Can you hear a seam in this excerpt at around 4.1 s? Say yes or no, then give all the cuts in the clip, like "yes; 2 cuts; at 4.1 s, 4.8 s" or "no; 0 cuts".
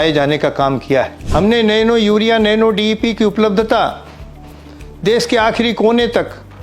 no; 1 cut; at 1.2 s